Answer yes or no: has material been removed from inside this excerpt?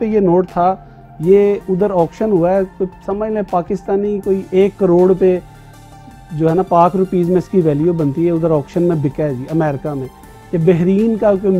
no